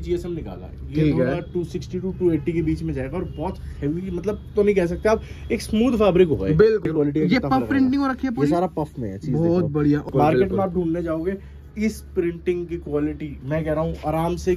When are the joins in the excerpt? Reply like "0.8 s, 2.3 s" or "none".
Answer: 6.8 s, 10.1 s